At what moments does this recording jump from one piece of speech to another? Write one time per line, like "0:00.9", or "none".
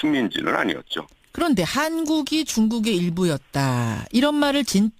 0:02.3